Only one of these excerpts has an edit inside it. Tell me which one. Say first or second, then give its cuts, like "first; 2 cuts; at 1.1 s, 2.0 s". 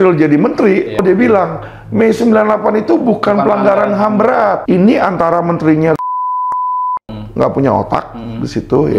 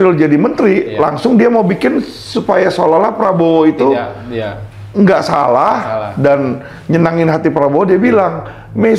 first; 2 cuts; at 1.0 s, 4.6 s